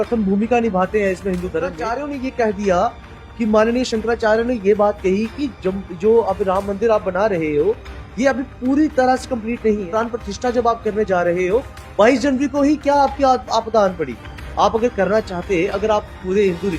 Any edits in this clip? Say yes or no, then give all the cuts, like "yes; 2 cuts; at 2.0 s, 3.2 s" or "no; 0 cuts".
yes; 2 cuts; at 1.9 s, 9.8 s